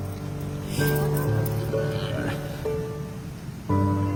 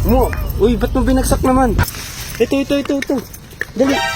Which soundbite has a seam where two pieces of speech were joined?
second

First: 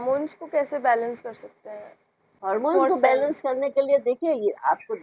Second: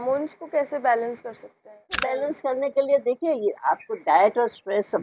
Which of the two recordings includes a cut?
second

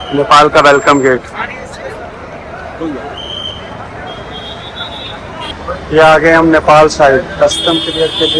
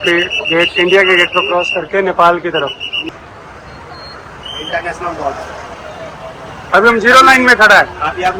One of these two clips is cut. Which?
second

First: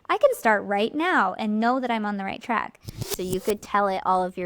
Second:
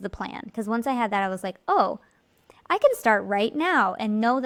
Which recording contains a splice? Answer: first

